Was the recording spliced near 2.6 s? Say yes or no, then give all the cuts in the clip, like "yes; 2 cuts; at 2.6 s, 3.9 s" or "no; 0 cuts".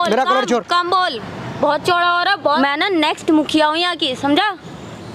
yes; 1 cut; at 2.6 s